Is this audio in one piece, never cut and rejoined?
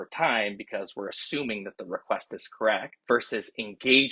no; 1 cut; at 2.9 s

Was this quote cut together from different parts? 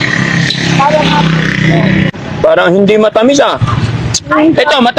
yes; 1 cut; at 2.1 s

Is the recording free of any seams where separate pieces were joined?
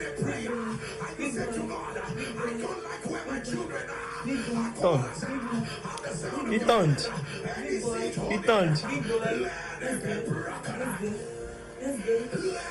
yes; 0 cuts

